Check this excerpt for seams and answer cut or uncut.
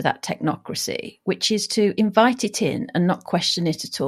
uncut